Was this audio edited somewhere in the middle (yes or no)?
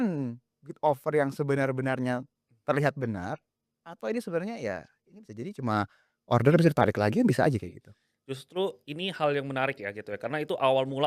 no